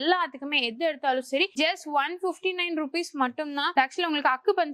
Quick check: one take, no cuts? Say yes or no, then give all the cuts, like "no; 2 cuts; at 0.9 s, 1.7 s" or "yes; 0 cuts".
no; 1 cut; at 3.7 s